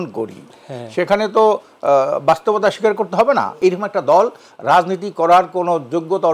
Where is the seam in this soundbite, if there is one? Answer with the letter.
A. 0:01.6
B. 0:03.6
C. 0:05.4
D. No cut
B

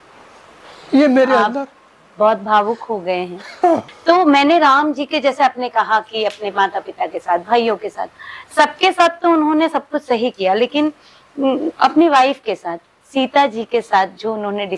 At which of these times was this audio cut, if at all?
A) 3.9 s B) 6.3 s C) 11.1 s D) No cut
A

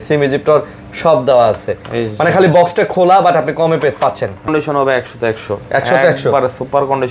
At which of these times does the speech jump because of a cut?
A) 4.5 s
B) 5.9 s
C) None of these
A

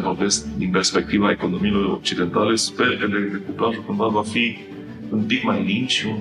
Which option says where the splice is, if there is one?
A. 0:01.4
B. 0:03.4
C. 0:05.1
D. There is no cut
C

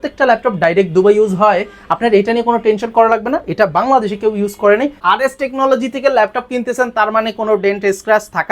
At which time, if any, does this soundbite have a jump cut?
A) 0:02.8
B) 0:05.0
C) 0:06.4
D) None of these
B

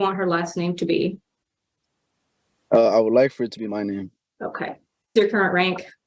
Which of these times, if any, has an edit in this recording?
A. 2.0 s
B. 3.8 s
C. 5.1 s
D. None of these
C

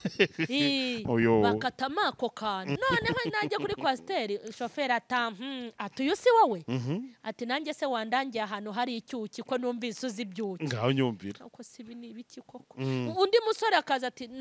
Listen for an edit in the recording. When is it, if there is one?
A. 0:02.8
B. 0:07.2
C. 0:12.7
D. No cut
A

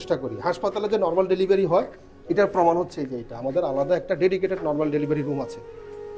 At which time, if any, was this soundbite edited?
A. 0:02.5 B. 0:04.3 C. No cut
C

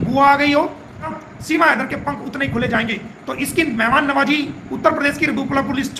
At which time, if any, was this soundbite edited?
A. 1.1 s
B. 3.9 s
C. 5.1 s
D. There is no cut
A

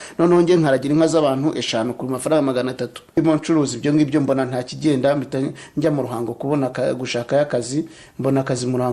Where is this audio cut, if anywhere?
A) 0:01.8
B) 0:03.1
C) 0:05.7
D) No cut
B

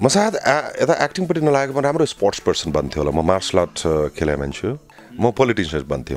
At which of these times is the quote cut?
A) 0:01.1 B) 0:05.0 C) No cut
B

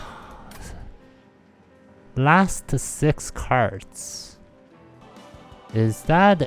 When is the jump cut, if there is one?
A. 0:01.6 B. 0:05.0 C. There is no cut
B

